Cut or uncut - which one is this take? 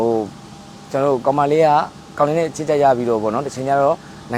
uncut